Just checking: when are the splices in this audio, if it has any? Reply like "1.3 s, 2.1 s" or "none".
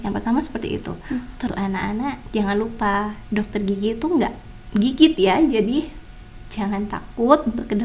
1.5 s